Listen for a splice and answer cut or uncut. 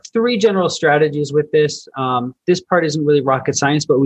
uncut